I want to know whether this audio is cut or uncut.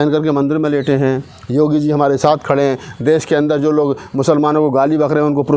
uncut